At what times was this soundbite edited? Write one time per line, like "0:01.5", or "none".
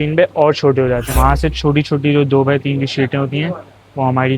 0:01.2